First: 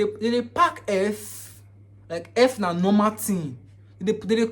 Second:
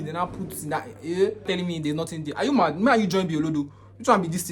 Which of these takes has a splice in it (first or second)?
second